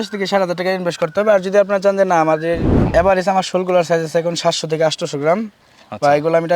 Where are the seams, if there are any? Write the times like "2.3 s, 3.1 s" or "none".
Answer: 2.7 s

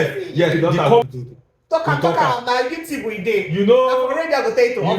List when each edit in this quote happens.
1.0 s

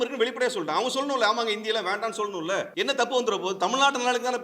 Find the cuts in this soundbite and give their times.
2.7 s

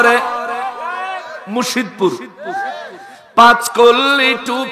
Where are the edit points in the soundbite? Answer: none

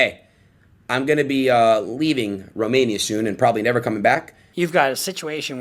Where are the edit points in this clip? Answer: 4.4 s

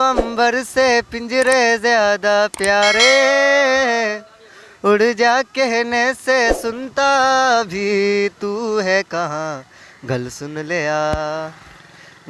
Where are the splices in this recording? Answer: none

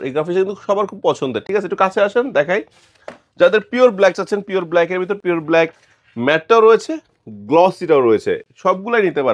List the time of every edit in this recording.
none

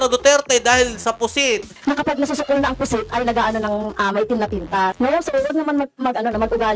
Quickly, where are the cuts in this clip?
1.8 s, 4.9 s

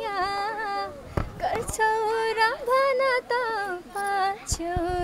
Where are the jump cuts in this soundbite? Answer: none

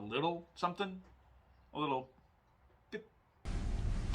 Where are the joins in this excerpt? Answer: 3.2 s

